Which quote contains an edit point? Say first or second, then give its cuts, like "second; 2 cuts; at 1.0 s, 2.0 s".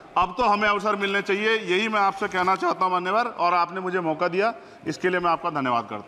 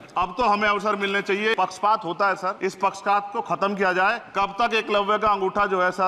second; 3 cuts; at 1.5 s, 2.6 s, 4.2 s